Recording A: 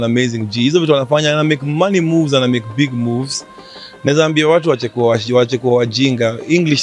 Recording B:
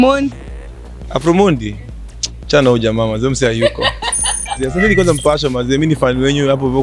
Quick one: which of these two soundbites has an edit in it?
B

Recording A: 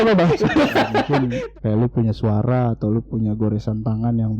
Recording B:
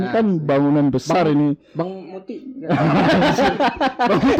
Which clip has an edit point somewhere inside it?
A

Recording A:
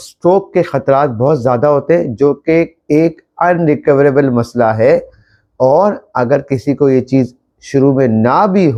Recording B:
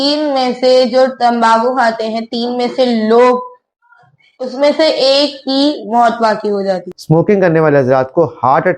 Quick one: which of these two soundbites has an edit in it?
B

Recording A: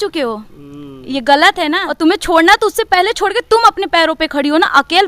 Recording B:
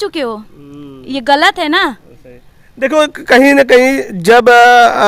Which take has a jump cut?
A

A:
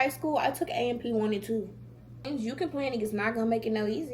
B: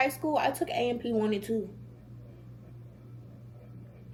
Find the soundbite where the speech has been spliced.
A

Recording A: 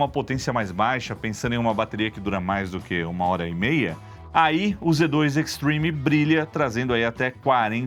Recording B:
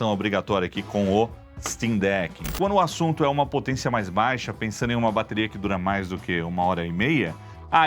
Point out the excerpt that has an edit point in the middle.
B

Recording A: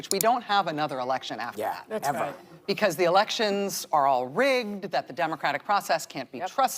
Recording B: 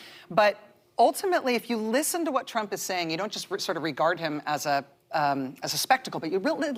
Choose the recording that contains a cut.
A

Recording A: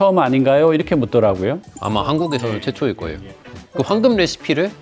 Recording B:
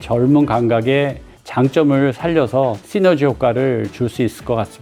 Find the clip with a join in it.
A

